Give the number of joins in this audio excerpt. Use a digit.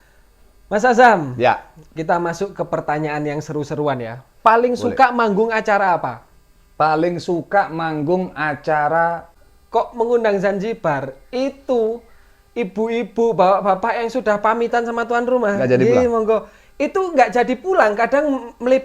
1